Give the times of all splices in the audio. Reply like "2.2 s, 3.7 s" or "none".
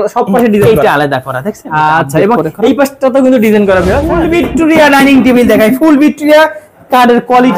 4.1 s